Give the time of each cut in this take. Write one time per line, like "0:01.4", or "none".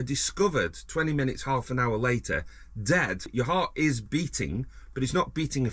0:03.3